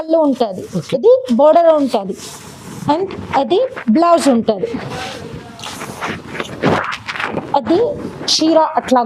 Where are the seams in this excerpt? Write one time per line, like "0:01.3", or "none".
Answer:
none